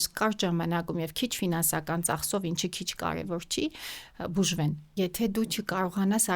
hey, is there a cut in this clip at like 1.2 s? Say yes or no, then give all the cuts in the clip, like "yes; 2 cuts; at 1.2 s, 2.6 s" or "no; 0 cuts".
no; 1 cut; at 4.9 s